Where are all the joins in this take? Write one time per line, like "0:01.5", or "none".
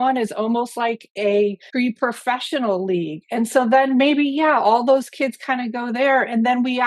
0:01.7